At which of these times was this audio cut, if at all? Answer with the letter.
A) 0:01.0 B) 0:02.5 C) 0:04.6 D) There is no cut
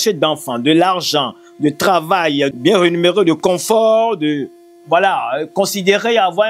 B